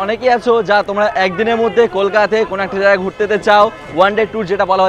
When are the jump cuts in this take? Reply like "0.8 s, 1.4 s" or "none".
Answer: none